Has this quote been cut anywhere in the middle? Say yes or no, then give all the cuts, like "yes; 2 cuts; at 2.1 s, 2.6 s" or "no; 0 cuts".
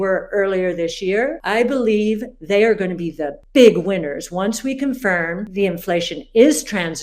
yes; 2 cuts; at 1.4 s, 5.4 s